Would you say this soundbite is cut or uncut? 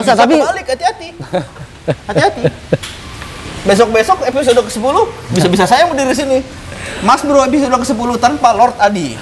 uncut